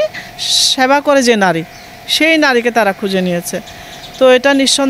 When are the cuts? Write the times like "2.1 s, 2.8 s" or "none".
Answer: none